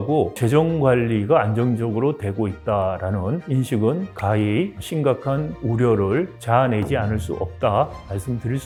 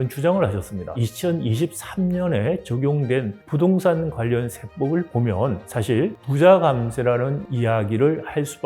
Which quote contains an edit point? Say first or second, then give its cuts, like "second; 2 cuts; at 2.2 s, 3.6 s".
second; 1 cut; at 0.9 s